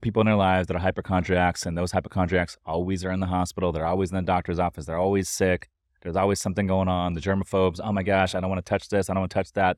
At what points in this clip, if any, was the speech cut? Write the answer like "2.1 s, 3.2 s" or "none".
none

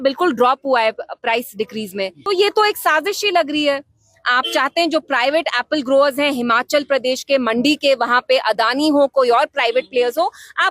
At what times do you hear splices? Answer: 2.2 s

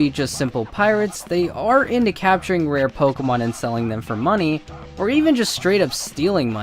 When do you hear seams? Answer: none

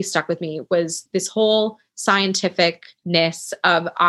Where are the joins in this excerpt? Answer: 1.0 s, 2.9 s

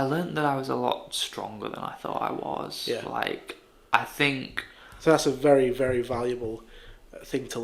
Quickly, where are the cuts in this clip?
none

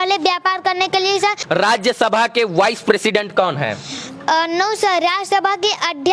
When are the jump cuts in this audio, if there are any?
1.4 s

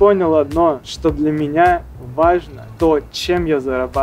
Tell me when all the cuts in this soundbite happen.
0.9 s, 2.6 s

